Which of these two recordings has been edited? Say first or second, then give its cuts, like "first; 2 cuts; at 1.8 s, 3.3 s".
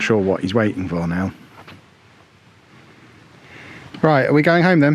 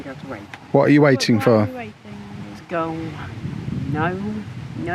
first; 1 cut; at 3.5 s